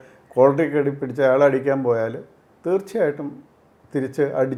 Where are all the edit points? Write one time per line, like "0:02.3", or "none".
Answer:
none